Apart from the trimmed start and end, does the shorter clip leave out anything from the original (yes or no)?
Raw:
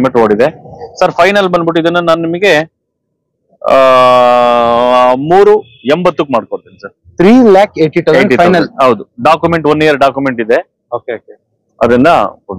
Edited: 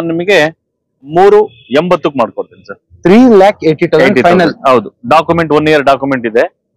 yes